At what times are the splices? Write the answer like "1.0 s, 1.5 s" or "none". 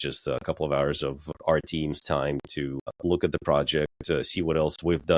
1.3 s, 2.9 s